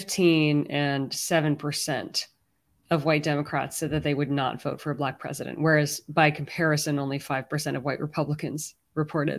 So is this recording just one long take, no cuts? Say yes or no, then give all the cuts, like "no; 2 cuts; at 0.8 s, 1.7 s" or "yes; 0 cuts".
yes; 0 cuts